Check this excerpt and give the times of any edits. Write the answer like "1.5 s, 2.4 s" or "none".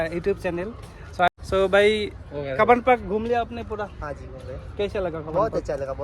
1.3 s